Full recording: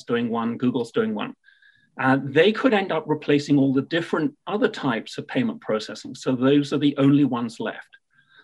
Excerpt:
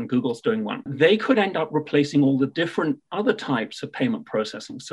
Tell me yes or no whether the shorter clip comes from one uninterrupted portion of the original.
no